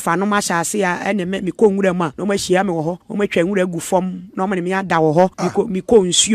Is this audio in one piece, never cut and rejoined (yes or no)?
no